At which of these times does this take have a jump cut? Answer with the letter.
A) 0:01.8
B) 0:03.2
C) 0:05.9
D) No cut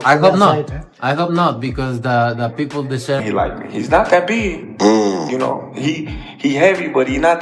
B